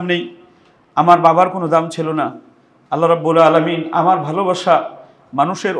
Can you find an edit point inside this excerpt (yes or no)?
no